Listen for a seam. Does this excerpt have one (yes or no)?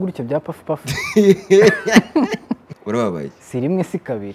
yes